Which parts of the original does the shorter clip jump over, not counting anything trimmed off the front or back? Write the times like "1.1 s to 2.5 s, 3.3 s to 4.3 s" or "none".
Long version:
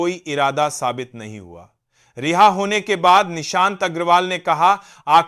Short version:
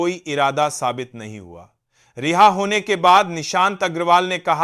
none